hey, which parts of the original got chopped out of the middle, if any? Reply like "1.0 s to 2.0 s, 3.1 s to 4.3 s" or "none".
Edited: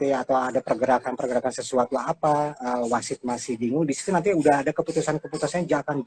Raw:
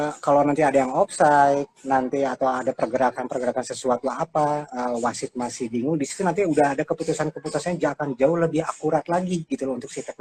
none